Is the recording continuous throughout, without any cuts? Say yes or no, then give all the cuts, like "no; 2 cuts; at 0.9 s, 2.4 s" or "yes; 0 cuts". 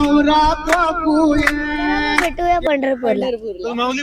no; 1 cut; at 2.3 s